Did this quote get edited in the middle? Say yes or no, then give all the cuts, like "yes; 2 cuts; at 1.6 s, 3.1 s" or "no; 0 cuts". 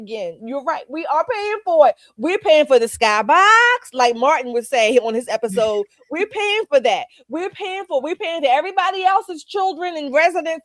no; 0 cuts